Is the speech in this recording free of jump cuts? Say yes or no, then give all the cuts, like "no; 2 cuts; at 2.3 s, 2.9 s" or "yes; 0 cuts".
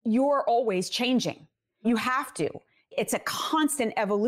no; 2 cuts; at 1.8 s, 2.9 s